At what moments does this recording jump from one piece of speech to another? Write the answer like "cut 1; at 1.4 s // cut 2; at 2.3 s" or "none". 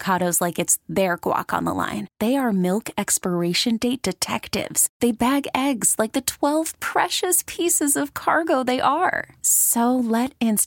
none